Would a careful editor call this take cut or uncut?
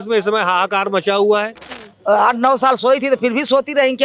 cut